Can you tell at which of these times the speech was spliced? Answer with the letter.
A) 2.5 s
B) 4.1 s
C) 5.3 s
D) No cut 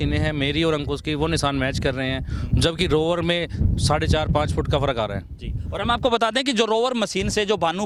D